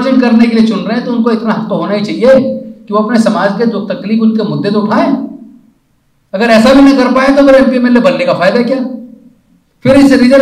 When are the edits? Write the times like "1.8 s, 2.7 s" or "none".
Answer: none